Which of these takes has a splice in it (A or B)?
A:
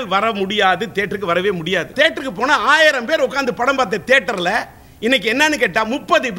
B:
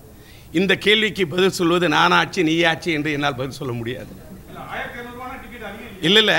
A